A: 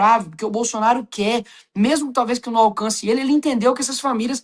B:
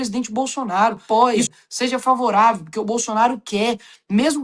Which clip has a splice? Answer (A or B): B